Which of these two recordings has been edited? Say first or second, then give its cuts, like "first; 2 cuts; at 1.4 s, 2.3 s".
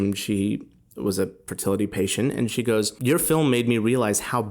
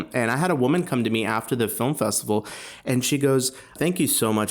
first; 1 cut; at 2.9 s